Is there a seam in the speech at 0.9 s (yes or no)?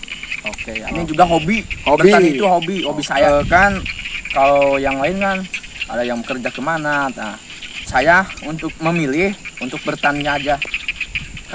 yes